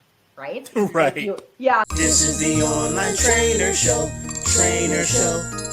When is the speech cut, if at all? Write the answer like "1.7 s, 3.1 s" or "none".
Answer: 1.8 s